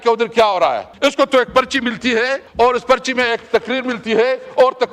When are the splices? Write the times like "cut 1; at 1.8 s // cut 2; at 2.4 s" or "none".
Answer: cut 1; at 0.9 s // cut 2; at 2.4 s